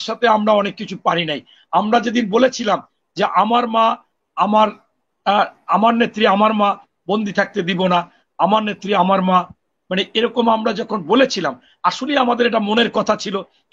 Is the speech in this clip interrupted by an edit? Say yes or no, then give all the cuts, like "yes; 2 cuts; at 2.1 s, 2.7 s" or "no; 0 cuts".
no; 0 cuts